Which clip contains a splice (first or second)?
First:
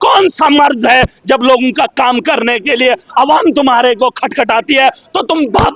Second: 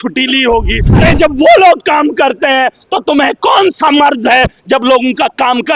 second